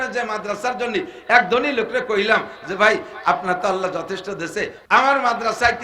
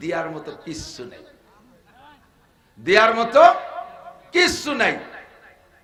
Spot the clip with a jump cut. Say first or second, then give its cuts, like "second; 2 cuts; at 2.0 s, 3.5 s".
first; 1 cut; at 4.8 s